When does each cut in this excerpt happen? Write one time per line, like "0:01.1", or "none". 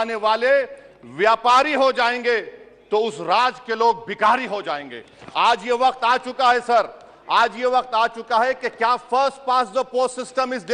none